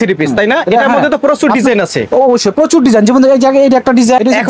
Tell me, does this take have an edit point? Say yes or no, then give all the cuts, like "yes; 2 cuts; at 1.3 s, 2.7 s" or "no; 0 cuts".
no; 0 cuts